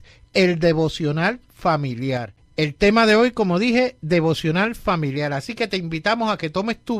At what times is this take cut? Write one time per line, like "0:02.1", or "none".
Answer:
0:03.3